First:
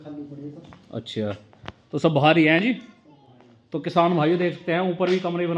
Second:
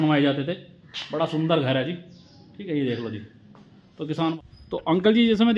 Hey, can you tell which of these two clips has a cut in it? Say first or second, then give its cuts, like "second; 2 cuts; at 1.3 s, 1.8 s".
second; 1 cut; at 4.3 s